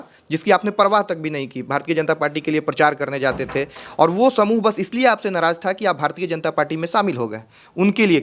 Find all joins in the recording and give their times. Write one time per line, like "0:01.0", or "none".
none